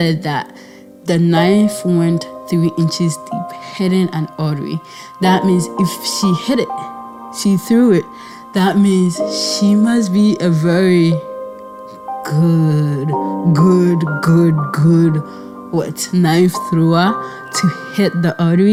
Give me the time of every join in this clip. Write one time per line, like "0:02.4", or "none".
none